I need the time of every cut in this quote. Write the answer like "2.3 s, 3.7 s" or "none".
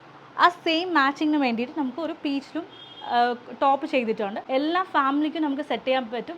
4.4 s